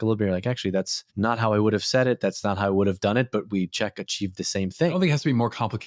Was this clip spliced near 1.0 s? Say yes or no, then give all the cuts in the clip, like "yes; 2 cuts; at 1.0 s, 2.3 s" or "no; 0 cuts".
yes; 2 cuts; at 1.0 s, 4.9 s